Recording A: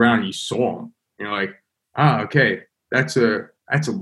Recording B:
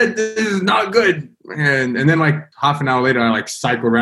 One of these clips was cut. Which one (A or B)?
B